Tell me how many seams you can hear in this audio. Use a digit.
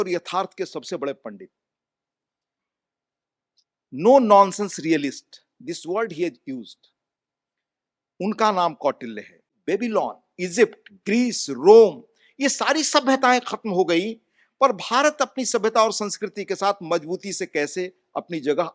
1